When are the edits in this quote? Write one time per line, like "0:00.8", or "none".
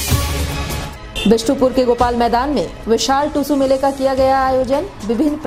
0:00.9